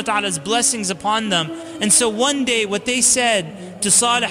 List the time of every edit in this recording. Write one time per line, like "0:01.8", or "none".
0:01.6